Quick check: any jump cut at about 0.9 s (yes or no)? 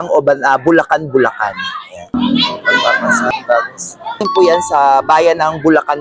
no